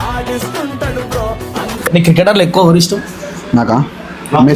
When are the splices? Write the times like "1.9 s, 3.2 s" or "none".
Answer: 1.9 s